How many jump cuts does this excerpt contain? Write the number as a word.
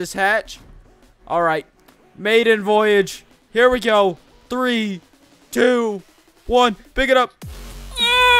zero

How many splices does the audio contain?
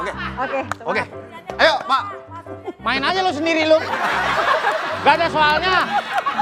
zero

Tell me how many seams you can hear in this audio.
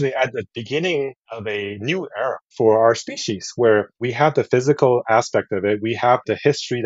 two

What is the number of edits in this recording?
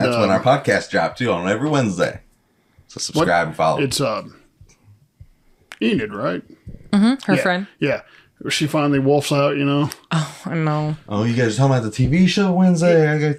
zero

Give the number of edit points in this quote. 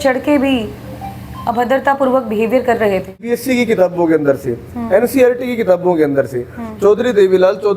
one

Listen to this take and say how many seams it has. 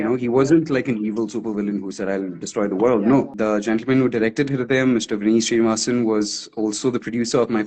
one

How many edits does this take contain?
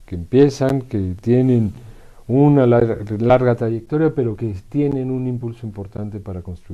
zero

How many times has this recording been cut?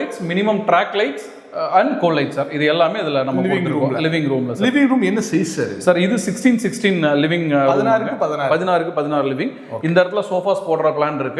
zero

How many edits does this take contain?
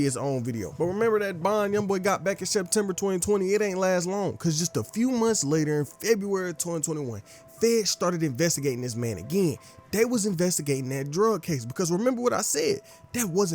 one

